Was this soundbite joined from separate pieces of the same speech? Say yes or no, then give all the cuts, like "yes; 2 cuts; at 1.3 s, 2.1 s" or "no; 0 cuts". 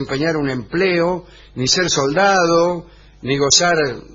no; 0 cuts